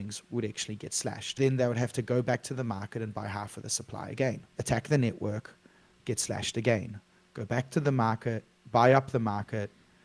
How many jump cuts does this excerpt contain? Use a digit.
2